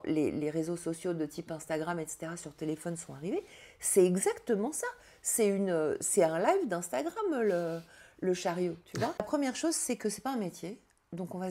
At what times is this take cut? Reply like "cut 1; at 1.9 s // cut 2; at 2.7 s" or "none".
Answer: cut 1; at 9.3 s